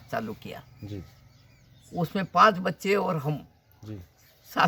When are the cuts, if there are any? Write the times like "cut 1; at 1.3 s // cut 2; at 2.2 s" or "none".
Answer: none

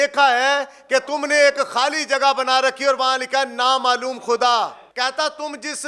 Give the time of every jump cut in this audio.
cut 1; at 1.1 s // cut 2; at 4.8 s

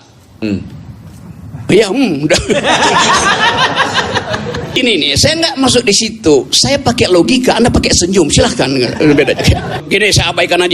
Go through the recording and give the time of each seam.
cut 1; at 4.8 s // cut 2; at 9.8 s

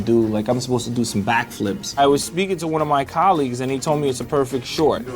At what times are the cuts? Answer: cut 1; at 2.0 s

